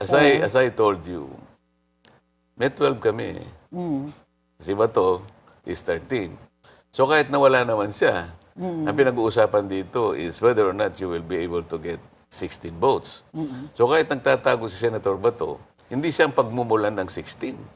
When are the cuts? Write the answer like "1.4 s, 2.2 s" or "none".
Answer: none